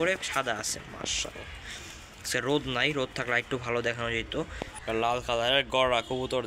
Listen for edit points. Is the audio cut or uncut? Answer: cut